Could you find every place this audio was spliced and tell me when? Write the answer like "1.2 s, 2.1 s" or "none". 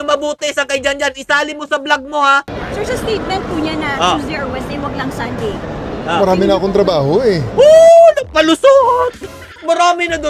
2.5 s